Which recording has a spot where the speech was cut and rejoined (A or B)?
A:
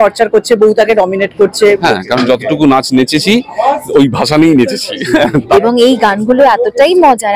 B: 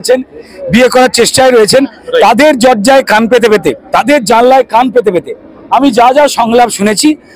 A